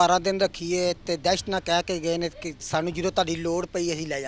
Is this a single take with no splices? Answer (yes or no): yes